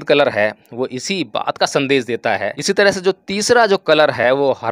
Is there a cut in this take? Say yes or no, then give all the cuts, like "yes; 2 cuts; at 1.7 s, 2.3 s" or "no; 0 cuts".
yes; 1 cut; at 2.5 s